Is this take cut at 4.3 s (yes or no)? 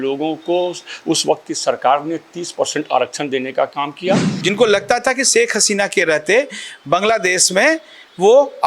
yes